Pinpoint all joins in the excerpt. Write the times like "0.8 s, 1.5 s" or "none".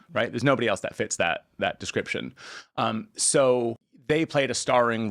3.9 s